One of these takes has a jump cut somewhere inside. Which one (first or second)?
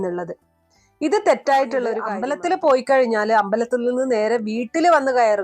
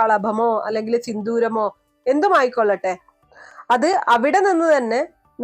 first